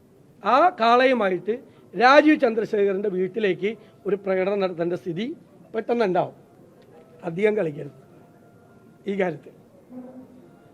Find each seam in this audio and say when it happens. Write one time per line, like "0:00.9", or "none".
0:06.4